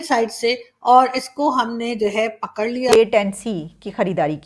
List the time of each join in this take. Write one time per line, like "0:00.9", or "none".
0:02.9